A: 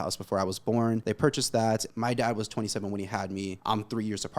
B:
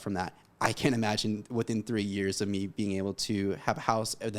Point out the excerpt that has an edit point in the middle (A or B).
A